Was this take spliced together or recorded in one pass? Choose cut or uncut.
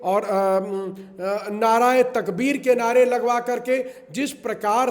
uncut